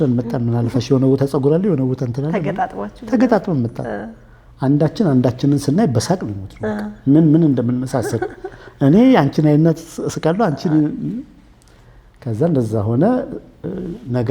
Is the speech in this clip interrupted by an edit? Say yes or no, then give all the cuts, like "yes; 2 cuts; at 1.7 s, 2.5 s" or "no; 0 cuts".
no; 0 cuts